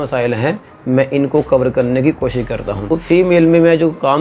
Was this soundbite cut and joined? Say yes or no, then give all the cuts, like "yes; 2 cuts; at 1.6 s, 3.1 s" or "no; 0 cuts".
yes; 1 cut; at 3.0 s